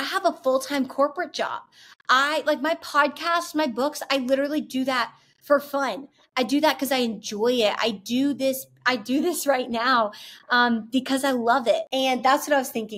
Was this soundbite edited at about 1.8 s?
no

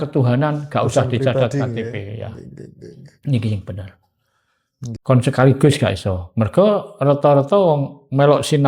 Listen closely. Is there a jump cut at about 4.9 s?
yes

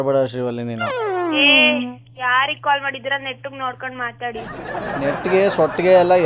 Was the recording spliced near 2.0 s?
no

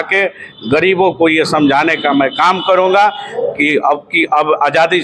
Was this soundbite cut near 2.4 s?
no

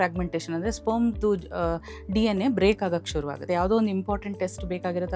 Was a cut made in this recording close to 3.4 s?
yes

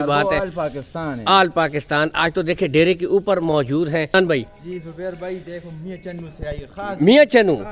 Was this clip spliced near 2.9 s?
no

